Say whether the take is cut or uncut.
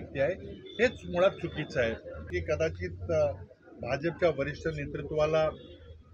cut